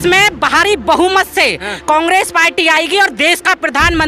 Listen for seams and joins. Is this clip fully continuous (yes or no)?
yes